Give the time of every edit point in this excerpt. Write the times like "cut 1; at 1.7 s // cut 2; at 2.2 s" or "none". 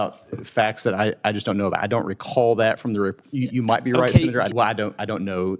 cut 1; at 4.5 s